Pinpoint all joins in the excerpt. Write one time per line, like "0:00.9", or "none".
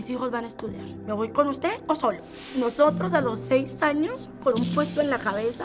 0:02.3